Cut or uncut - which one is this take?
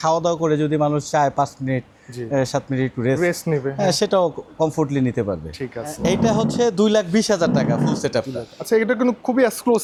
uncut